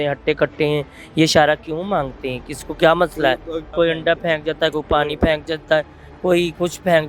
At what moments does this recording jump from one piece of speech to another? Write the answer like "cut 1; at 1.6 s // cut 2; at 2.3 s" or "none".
cut 1; at 3.7 s

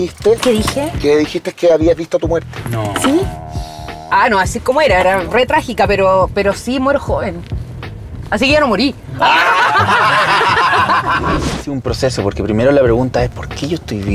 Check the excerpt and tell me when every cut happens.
cut 1; at 11.3 s

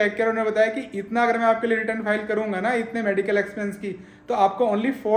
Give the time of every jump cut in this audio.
none

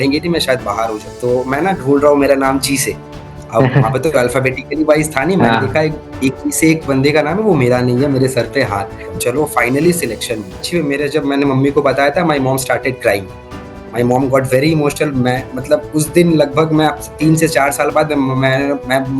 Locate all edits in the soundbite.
cut 1; at 1.0 s // cut 2; at 9.2 s // cut 3; at 10.7 s

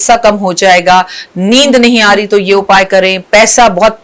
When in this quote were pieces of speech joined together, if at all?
none

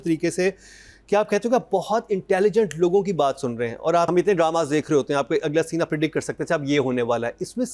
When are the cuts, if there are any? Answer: cut 1; at 4.1 s

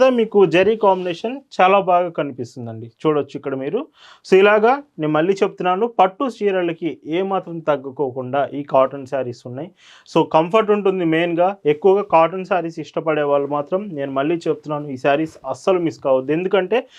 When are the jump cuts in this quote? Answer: none

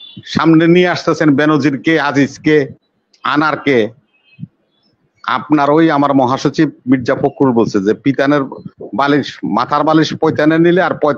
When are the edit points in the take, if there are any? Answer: none

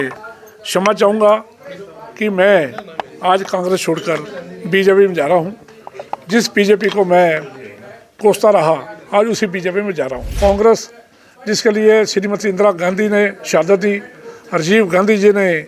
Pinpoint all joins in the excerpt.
cut 1; at 10.4 s

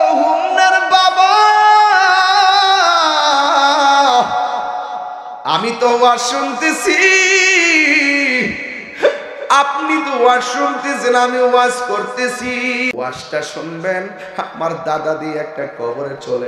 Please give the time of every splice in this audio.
cut 1; at 12.9 s

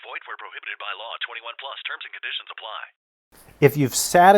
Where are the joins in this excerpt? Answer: cut 1; at 3.2 s

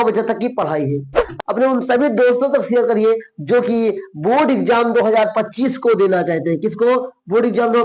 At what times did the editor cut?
cut 1; at 1.3 s

